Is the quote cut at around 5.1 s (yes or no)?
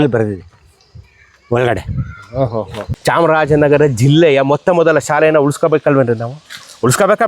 no